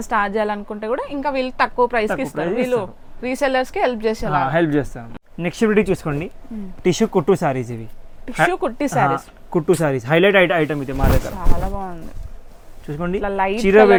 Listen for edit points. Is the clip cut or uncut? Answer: uncut